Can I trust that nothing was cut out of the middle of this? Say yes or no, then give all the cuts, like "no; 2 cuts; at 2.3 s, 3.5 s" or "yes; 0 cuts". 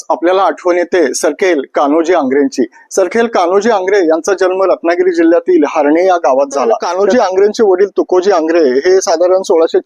no; 1 cut; at 6.9 s